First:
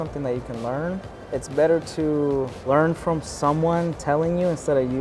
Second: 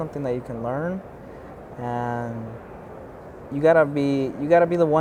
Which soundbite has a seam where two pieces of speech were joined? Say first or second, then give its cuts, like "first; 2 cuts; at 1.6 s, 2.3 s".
first; 2 cuts; at 1.1 s, 2.6 s